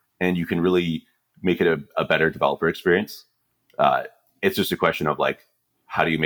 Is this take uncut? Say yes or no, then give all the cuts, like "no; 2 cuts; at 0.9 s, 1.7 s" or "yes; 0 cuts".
yes; 0 cuts